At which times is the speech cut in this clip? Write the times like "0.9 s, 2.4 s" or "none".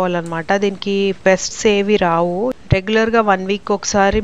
2.5 s